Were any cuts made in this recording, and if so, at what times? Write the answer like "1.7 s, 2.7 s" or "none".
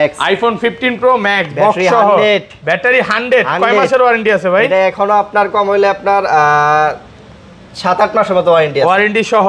none